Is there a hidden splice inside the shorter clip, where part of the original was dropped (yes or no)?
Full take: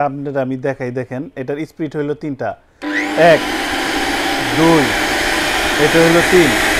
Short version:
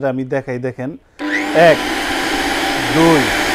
yes